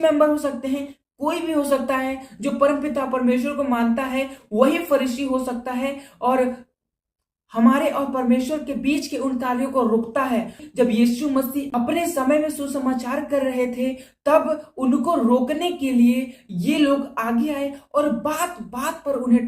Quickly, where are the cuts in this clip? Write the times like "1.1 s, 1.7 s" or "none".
10.6 s